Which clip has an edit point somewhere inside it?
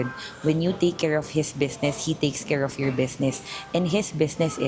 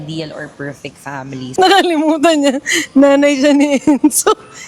second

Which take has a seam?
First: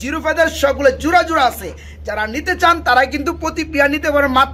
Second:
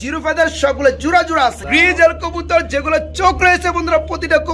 second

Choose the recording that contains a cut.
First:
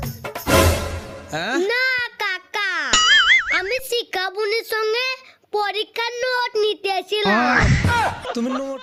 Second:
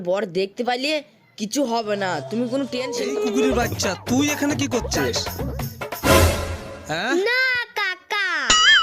second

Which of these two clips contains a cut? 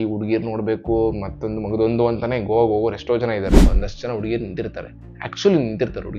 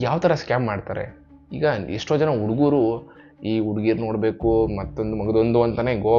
first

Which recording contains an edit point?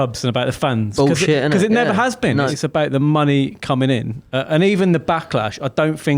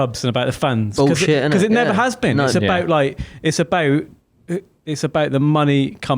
first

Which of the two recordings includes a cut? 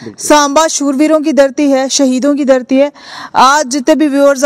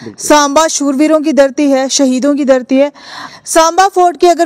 second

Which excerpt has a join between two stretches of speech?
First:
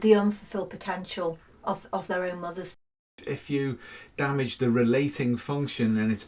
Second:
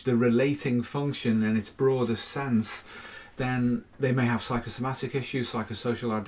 first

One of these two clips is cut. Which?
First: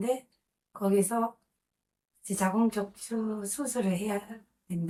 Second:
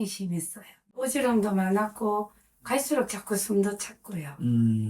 second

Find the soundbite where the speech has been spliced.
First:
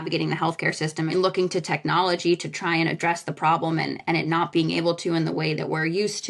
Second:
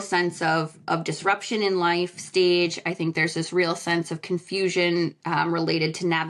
first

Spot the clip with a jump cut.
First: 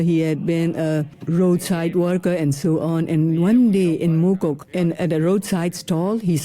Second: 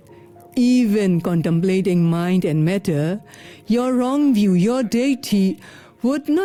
first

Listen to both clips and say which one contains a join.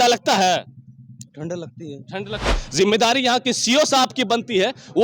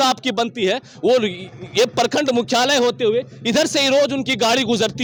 first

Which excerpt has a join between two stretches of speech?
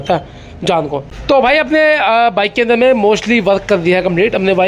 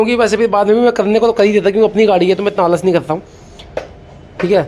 first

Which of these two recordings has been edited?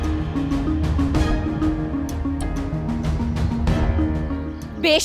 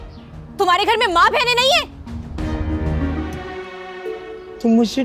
second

